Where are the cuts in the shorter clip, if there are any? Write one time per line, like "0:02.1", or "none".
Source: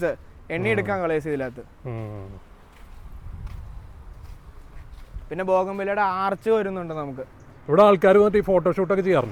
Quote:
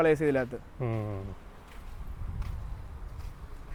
none

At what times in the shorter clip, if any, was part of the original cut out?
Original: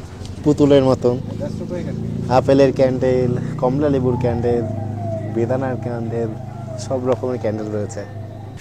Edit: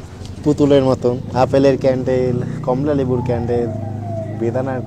0:01.2

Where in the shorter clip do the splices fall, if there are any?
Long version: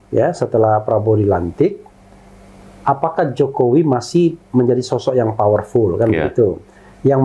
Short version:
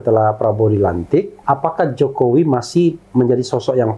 0:01.3

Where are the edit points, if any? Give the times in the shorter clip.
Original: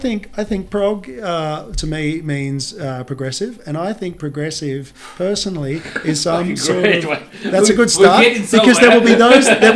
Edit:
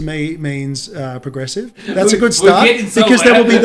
0:01.8

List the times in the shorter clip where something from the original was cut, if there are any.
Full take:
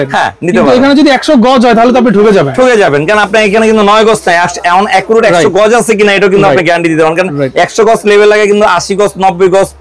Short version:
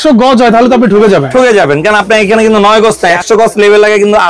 0:03.2

